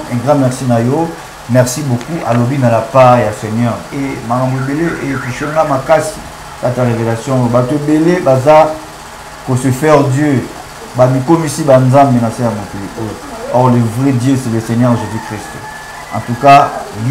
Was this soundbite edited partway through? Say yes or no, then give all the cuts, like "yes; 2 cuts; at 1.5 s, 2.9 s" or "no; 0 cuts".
no; 0 cuts